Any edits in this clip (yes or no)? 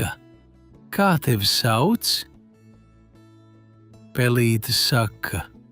yes